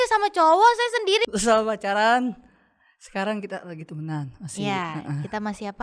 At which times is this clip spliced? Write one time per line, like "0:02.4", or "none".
0:01.2